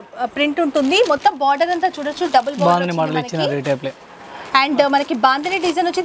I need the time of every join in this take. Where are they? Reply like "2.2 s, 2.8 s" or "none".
none